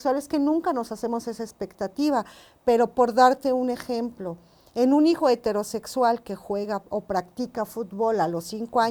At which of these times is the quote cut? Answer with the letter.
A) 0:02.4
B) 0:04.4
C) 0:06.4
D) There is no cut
D